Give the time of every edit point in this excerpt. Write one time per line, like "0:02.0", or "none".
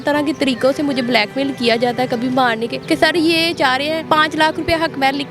0:02.7
0:04.0